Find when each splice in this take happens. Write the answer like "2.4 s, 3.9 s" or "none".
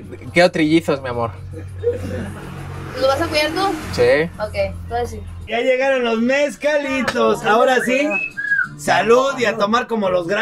5.4 s